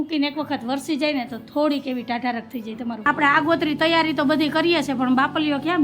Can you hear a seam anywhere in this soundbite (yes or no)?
yes